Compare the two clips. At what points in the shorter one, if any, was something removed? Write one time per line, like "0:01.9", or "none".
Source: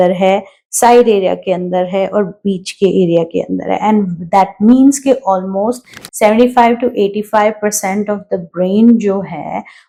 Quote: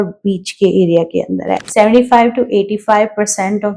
0:01.5